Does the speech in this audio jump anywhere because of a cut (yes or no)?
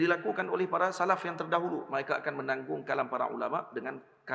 no